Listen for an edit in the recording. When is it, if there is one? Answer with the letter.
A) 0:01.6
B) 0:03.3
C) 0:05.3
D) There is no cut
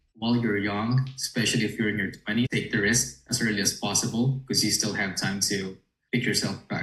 D